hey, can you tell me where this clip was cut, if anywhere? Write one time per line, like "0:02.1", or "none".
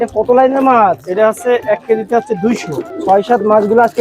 0:02.9

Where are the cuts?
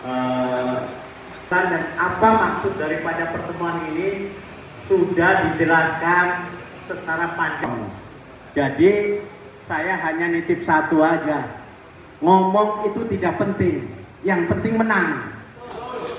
0:01.5

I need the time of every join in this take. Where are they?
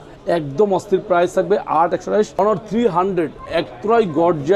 0:02.4

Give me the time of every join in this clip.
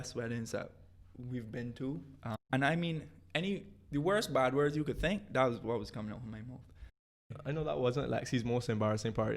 0:02.4
0:07.3

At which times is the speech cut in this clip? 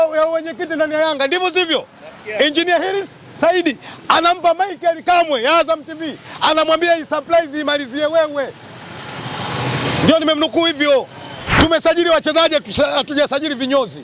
0:11.5

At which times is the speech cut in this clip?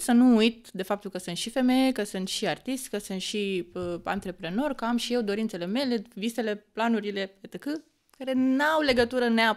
none

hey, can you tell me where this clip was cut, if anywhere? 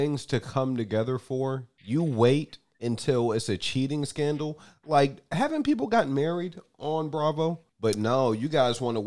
0:01.7
0:07.7

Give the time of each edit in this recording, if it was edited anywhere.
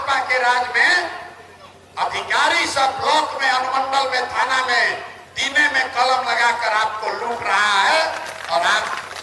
none

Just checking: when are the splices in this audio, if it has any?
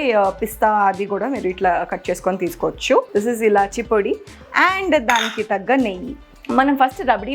0:03.1
0:06.3

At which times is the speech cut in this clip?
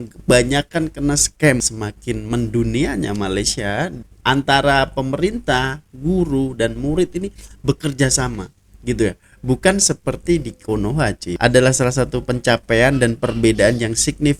0:01.6
0:04.0
0:11.3

